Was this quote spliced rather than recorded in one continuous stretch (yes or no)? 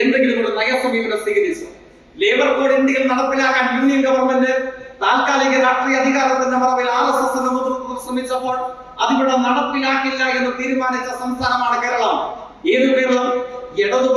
no